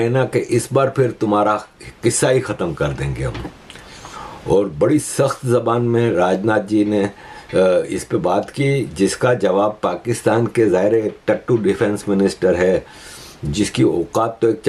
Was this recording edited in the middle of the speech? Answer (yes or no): no